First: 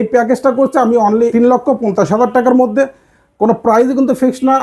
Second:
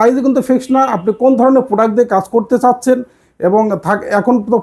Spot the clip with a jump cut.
first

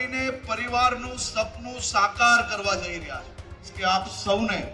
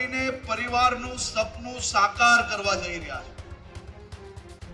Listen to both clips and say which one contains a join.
first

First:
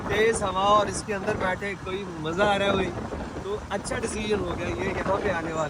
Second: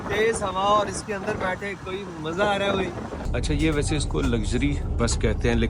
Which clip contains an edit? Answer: second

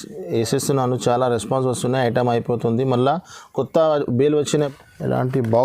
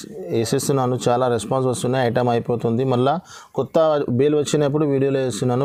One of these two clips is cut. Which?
first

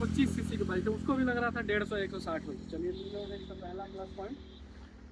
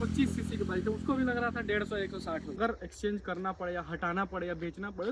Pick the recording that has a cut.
second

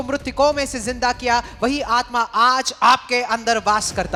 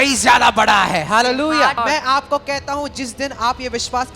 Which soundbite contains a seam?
second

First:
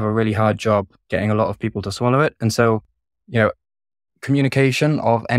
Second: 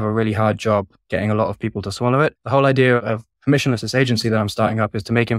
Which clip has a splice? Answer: second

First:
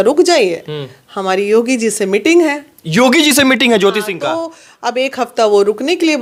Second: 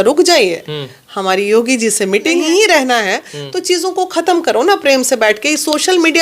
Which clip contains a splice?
second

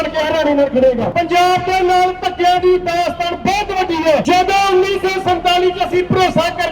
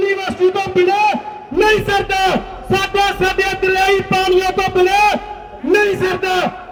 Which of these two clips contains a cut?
first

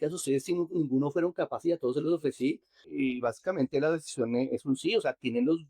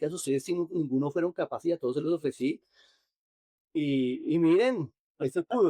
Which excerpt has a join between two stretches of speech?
first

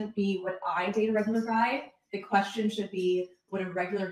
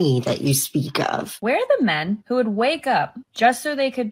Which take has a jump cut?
second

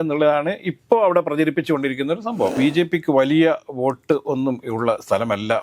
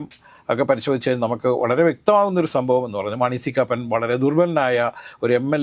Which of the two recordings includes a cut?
first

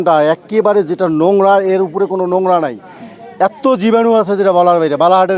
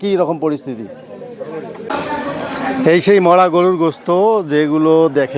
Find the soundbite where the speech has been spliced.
second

